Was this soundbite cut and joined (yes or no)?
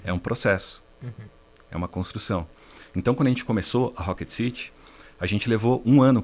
no